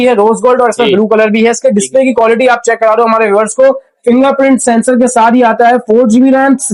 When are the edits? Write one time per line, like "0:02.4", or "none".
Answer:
none